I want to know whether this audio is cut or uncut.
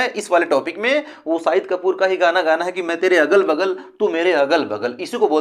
uncut